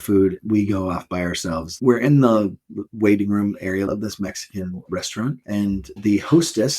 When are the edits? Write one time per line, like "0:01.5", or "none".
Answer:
0:01.8
0:03.9
0:06.0